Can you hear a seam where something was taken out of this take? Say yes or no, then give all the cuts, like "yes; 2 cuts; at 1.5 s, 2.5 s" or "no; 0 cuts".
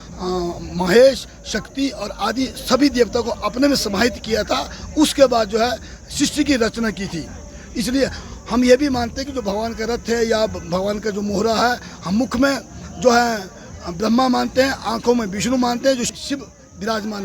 yes; 1 cut; at 16.1 s